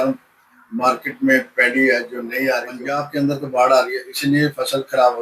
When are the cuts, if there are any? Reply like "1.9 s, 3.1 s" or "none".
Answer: 3.0 s